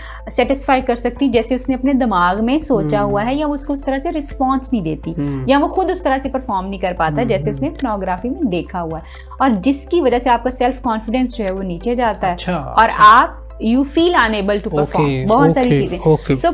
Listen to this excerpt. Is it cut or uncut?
uncut